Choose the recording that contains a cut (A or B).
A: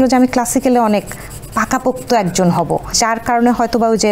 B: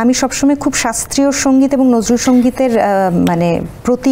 A